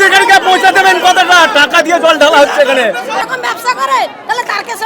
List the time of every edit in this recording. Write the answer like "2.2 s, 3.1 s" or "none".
3.2 s